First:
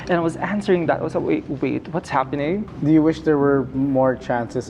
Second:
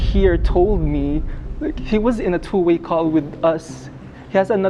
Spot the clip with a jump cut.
first; 1 cut; at 2.7 s

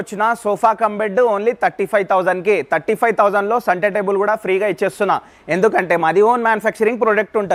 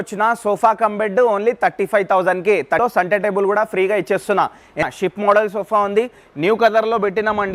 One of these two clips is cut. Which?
second; 2 cuts; at 2.8 s, 4.8 s

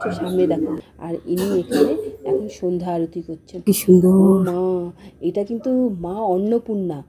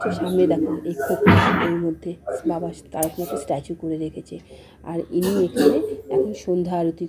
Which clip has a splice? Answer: first; 2 cuts; at 0.8 s, 3.6 s

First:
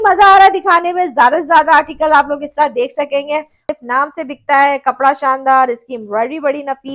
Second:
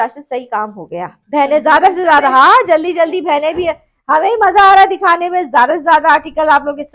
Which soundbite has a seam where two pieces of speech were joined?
first; 1 cut; at 3.6 s

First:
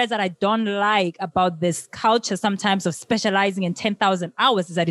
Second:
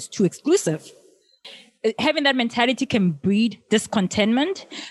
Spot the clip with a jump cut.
second; 1 cut; at 1.4 s

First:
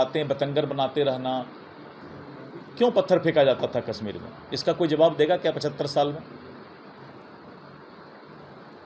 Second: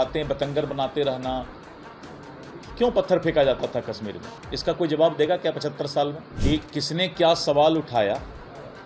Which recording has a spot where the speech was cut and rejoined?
second; 1 cut; at 6.3 s

